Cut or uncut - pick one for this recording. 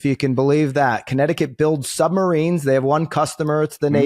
uncut